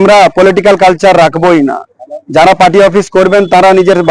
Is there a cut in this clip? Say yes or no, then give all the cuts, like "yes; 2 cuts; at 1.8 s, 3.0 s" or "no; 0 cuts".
no; 0 cuts